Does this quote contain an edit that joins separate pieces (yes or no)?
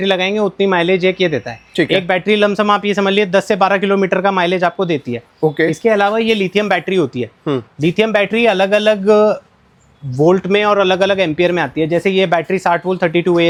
no